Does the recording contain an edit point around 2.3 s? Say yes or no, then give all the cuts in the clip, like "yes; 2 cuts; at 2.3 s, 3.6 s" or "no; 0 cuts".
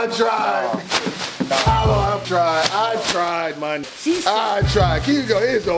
yes; 2 cuts; at 2.3 s, 3.9 s